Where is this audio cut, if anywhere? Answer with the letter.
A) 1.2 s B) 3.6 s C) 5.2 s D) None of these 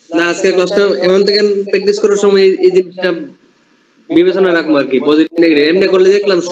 D